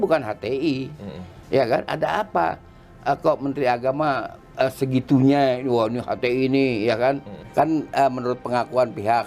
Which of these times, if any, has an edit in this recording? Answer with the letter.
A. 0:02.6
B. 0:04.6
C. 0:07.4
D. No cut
C